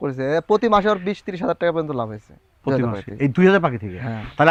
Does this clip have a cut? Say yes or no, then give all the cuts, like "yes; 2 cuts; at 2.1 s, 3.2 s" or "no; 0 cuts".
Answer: no; 0 cuts